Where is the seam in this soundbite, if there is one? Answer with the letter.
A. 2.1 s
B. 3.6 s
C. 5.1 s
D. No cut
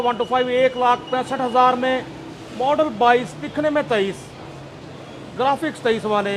D